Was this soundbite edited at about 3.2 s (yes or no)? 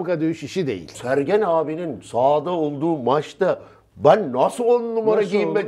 no